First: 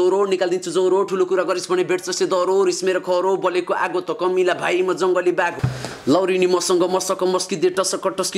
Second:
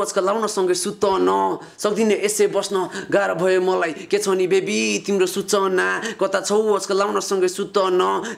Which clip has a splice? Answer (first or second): first